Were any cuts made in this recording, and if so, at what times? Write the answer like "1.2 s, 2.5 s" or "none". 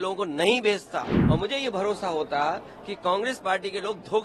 1.1 s